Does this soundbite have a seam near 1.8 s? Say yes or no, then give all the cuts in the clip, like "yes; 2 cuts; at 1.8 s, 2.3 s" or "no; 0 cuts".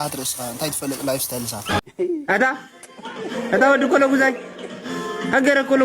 yes; 1 cut; at 1.8 s